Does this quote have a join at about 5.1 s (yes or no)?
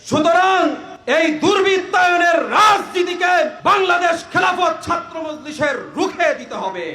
no